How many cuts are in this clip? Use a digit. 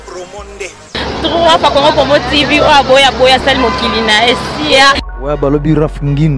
1